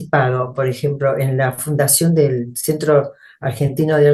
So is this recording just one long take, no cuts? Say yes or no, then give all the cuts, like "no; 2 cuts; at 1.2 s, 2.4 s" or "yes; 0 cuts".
yes; 0 cuts